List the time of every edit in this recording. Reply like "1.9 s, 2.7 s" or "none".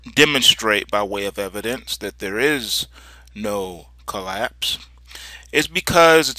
5.4 s

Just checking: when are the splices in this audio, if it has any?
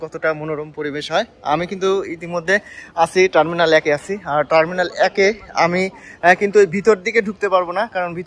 none

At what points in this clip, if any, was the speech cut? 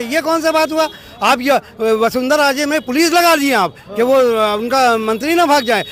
none

